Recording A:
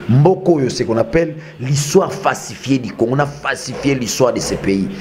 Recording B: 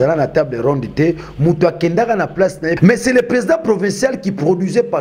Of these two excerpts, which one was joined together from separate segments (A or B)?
B